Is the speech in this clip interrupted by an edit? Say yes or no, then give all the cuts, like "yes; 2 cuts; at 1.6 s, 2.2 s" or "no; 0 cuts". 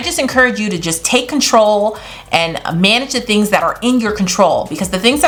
no; 0 cuts